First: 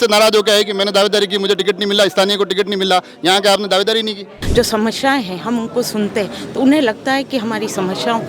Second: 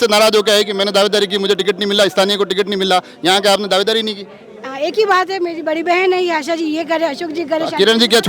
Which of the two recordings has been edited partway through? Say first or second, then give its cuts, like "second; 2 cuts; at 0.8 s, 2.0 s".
first; 1 cut; at 4.3 s